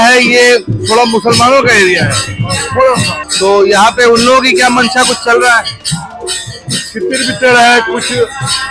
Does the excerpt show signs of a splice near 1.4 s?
no; 1 cut; at 3.2 s

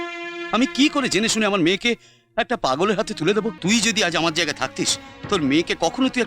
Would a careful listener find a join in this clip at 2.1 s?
no; 1 cut; at 3.6 s

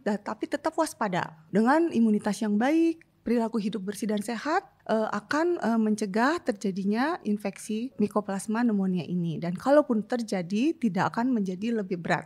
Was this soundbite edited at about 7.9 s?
yes; 3 cuts; at 1.5 s, 4.8 s, 7.9 s

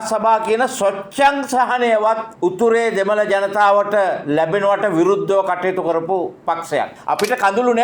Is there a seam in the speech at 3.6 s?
no; 2 cuts; at 2.3 s, 7.0 s

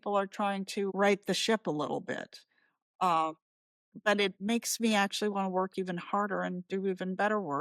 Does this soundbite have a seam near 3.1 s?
no; 2 cuts; at 0.9 s, 4.4 s

